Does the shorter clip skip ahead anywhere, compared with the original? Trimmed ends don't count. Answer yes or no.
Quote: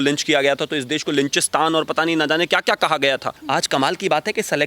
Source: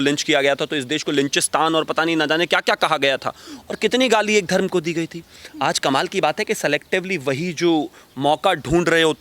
yes